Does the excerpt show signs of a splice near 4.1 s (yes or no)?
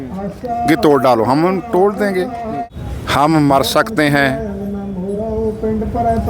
no